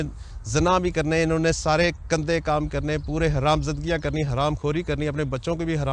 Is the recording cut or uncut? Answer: uncut